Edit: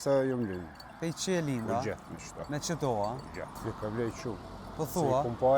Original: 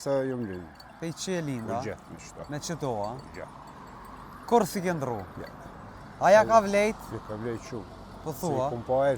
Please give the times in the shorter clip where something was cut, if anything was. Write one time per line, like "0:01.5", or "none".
0:03.7